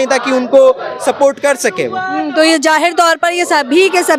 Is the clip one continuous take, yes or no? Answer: yes